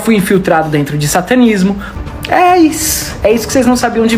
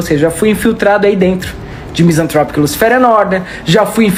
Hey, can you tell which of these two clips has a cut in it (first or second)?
first